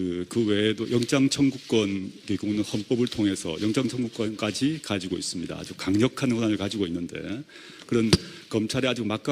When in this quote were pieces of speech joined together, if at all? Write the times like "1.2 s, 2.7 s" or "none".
1.7 s